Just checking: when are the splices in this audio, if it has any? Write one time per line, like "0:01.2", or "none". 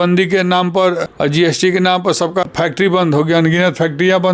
0:01.0
0:02.4